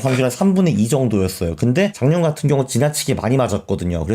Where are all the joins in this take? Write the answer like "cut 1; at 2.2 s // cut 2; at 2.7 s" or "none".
cut 1; at 1.9 s

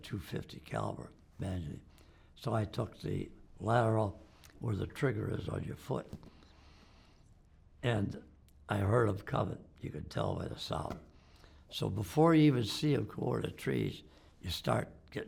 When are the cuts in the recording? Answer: none

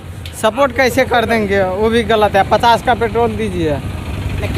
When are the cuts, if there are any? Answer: none

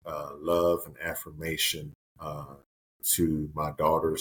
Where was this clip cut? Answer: none

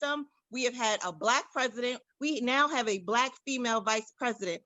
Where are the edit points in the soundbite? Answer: cut 1; at 2.1 s

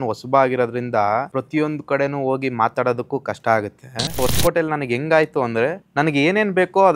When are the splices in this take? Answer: cut 1; at 1.3 s // cut 2; at 4.2 s // cut 3; at 5.8 s

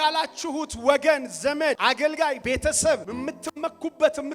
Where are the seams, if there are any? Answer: cut 1; at 2.2 s // cut 2; at 3.1 s

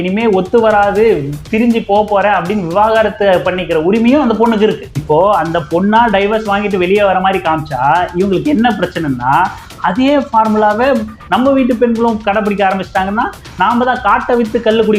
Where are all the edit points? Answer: cut 1; at 4.9 s

